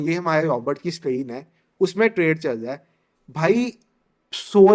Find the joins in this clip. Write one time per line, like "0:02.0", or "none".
none